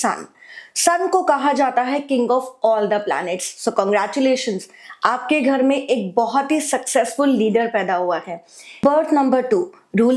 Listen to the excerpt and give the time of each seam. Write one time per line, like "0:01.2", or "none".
0:08.8